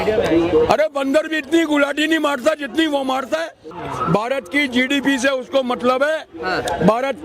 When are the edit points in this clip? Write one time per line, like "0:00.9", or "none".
0:03.6